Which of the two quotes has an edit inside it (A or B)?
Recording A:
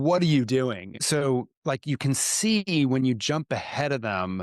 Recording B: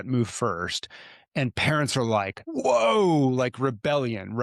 A